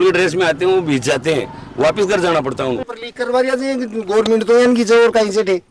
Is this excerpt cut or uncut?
cut